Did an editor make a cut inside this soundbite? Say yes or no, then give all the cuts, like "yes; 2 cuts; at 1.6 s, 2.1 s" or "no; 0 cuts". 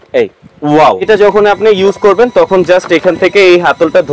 yes; 1 cut; at 1.1 s